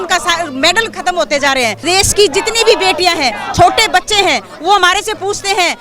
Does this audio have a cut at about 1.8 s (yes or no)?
yes